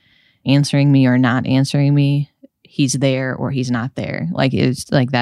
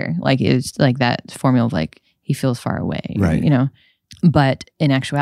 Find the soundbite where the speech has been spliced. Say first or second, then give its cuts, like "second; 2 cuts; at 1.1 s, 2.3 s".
second; 1 cut; at 2.1 s